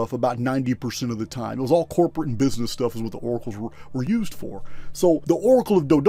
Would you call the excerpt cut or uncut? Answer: uncut